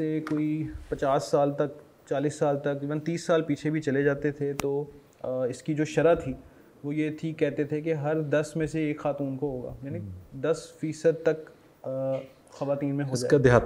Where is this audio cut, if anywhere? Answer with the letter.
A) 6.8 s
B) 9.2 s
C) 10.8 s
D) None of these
D